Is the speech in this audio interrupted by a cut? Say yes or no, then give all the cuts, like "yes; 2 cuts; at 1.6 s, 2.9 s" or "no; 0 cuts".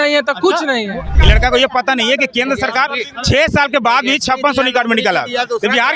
yes; 1 cut; at 1.2 s